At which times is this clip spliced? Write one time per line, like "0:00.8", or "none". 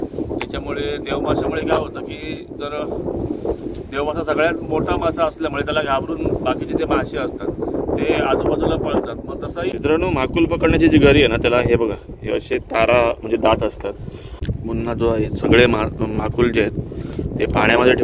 0:09.7
0:14.5